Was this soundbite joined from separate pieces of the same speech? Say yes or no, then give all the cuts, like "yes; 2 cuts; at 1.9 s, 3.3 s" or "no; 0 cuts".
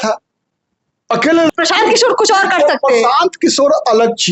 yes; 1 cut; at 1.5 s